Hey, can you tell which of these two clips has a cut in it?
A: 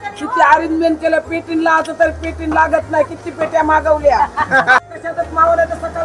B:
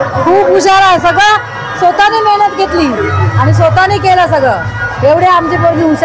A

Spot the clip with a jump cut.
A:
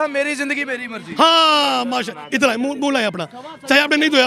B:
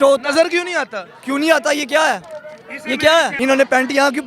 B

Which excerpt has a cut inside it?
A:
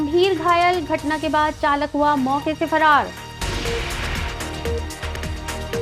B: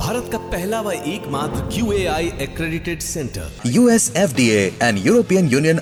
A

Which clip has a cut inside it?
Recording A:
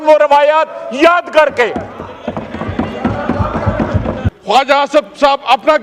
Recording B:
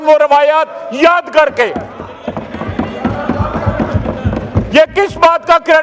A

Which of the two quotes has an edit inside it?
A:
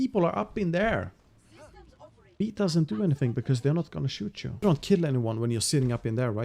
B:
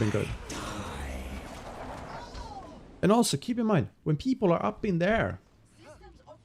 A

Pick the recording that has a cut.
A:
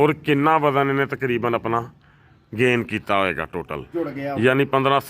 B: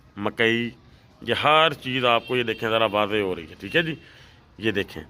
A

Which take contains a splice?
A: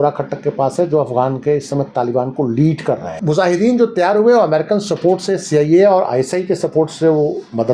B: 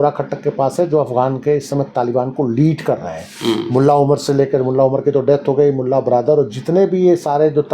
A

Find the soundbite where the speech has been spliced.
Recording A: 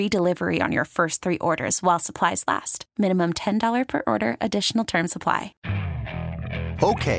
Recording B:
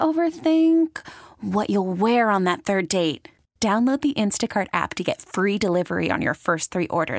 A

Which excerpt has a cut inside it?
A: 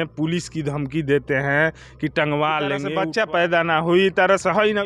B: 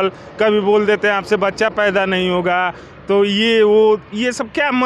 A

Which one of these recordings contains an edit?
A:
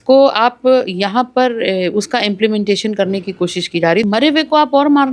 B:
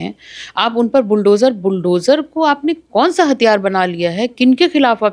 A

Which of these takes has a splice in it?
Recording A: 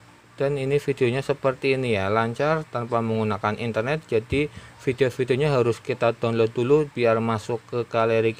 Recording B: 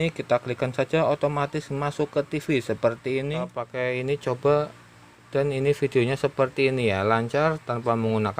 B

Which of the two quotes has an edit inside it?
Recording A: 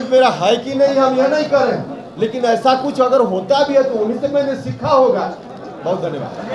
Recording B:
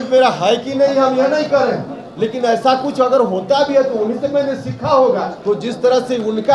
B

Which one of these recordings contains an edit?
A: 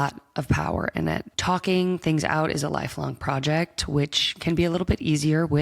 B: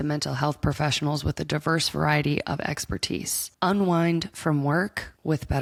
A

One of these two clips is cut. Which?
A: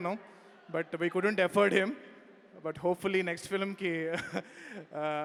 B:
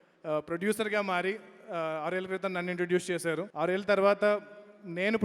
B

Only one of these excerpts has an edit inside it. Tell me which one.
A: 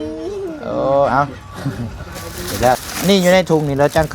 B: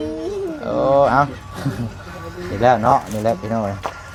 A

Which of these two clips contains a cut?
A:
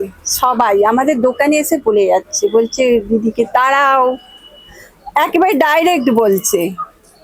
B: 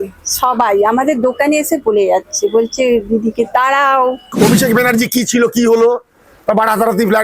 B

